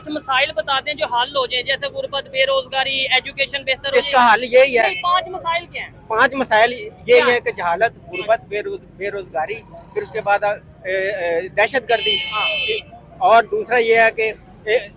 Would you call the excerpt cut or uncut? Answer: uncut